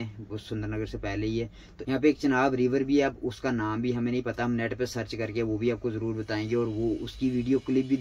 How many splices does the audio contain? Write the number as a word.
one